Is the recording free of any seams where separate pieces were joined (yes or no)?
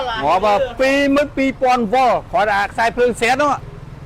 no